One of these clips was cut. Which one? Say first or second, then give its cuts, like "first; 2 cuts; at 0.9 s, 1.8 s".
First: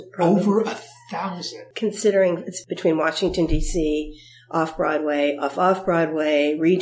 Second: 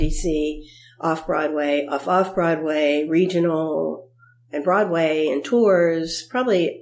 first; 2 cuts; at 1.6 s, 2.5 s